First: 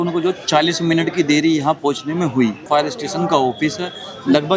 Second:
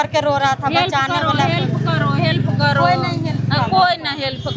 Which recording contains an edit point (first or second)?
first